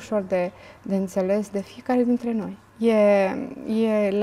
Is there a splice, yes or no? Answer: yes